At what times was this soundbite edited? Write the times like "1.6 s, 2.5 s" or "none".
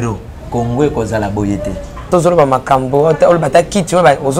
2.1 s